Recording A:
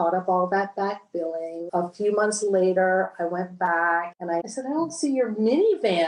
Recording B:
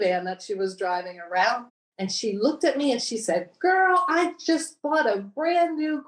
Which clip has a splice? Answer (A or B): A